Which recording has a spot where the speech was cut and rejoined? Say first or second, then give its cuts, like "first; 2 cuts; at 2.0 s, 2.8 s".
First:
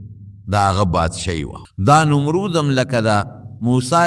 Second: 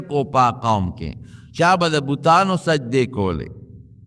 first; 1 cut; at 1.6 s